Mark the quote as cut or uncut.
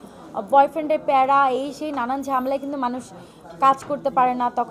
uncut